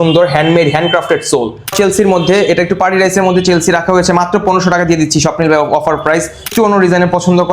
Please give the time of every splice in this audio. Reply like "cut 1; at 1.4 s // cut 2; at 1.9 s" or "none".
cut 1; at 1.6 s // cut 2; at 6.5 s